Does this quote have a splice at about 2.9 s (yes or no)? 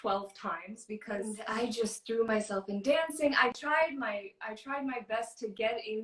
no